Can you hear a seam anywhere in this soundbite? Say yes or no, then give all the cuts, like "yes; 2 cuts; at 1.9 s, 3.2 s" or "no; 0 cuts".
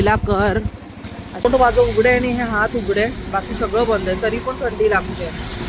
yes; 1 cut; at 1.4 s